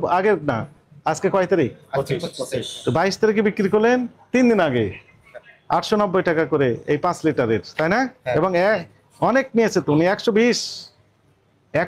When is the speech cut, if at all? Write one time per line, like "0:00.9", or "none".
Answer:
none